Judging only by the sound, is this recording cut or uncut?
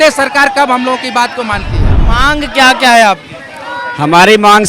cut